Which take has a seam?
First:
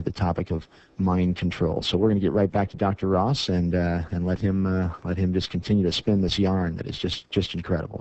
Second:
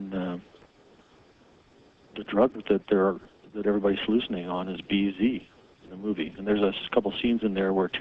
first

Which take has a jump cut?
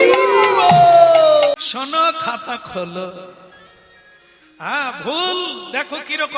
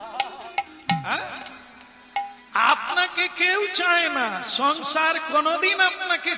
first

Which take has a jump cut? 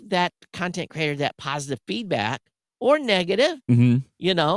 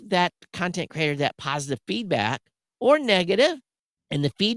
second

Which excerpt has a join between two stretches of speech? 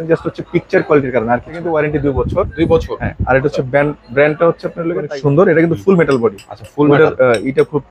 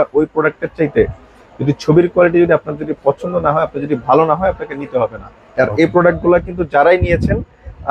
first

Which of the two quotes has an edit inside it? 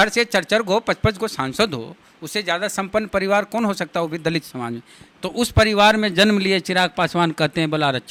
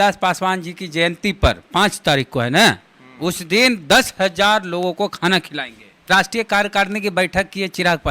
second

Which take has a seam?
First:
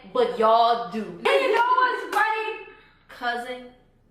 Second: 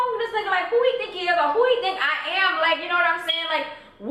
first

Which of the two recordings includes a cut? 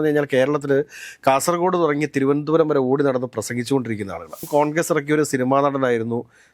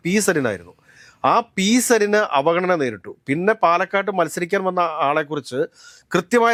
first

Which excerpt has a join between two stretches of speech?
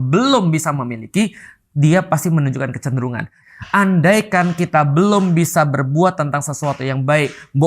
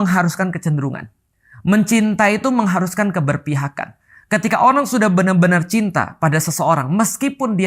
first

